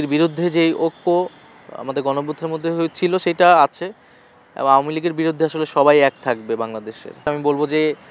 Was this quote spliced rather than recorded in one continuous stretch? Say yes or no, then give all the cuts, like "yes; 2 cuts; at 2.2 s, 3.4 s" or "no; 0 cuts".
yes; 1 cut; at 7.1 s